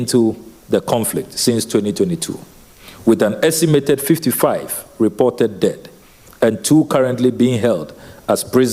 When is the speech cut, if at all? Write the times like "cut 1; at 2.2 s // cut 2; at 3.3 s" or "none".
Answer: none